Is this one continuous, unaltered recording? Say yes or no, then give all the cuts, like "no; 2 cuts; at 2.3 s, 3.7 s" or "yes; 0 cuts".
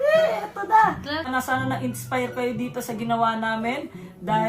no; 1 cut; at 1.3 s